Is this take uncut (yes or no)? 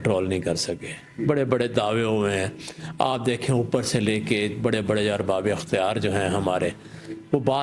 yes